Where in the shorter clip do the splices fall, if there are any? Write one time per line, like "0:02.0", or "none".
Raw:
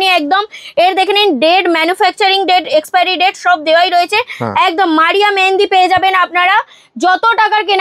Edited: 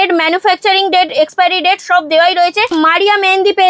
0:02.7

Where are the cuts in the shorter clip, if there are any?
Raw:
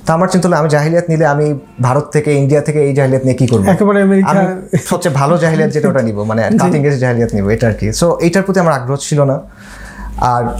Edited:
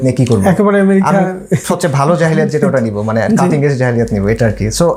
none

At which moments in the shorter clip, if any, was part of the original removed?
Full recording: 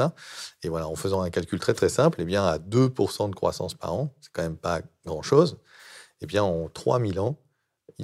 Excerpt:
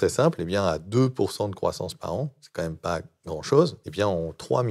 0:03.8

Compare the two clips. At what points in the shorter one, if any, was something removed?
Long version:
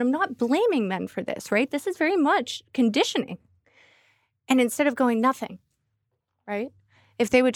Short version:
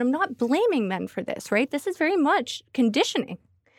none

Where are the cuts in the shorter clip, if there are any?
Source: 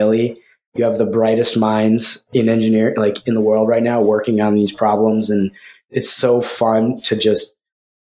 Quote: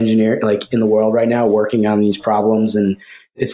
none

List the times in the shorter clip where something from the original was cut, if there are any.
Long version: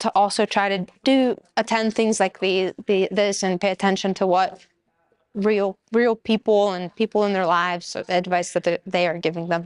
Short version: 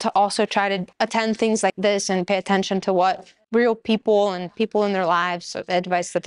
0:00.9
0:01.8
0:03.4

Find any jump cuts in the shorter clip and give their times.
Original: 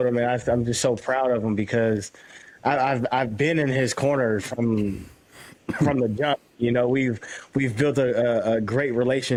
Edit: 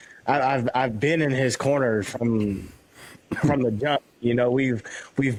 none

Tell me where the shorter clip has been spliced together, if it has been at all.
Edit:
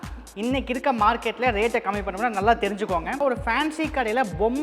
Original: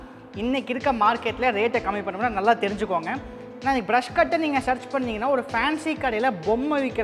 0:03.2

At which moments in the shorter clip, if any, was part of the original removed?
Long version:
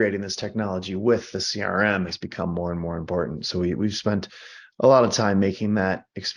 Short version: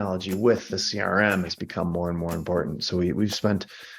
none

